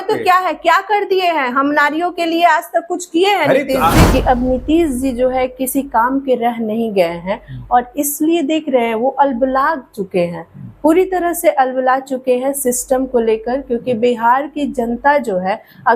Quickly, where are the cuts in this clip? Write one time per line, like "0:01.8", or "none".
0:04.0